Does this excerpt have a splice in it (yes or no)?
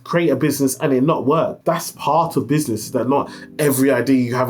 no